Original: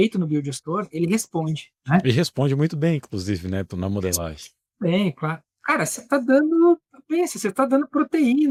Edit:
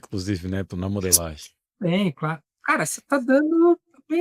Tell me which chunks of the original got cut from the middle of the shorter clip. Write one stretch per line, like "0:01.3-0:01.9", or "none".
none